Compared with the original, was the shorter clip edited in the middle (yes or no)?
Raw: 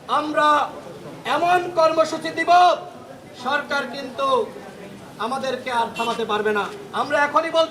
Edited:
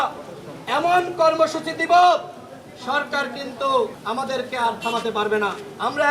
yes